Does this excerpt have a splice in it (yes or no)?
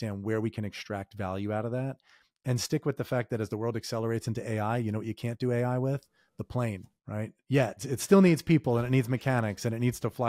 no